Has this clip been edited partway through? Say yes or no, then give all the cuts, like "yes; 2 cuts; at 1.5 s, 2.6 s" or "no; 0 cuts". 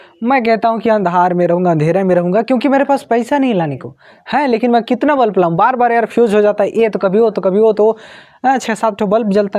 no; 0 cuts